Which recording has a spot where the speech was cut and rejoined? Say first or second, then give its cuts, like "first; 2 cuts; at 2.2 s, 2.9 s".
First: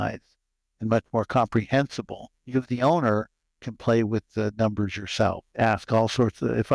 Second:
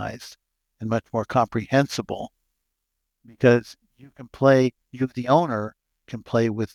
first; 1 cut; at 2.4 s